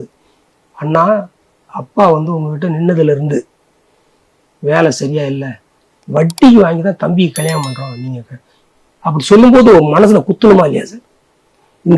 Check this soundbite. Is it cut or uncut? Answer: uncut